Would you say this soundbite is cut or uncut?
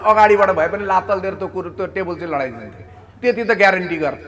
uncut